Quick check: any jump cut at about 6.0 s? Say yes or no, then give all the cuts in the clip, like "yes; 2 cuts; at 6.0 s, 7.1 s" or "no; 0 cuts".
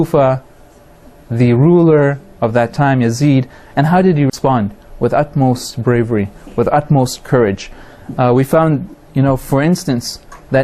no; 1 cut; at 4.3 s